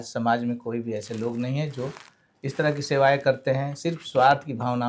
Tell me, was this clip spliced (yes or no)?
no